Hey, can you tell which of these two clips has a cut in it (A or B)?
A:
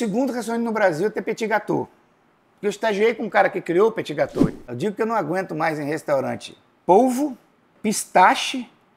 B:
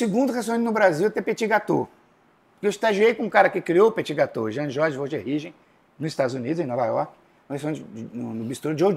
A